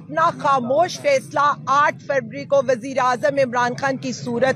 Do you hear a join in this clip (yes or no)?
no